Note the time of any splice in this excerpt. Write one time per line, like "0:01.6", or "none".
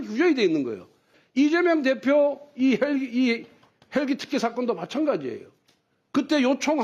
0:01.1